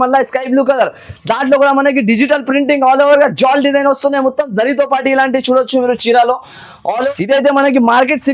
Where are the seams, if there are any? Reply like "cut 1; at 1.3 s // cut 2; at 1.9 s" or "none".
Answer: cut 1; at 7.0 s